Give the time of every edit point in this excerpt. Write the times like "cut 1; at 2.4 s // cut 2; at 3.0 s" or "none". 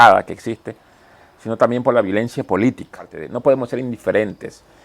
cut 1; at 3.2 s